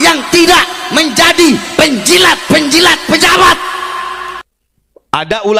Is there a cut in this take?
yes; 1 cut; at 4.4 s

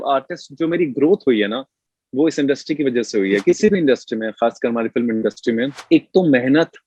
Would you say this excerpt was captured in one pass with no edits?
no; 2 cuts; at 3.4 s, 5.8 s

